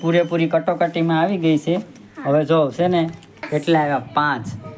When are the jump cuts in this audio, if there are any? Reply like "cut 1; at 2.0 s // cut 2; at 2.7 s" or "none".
cut 1; at 3.4 s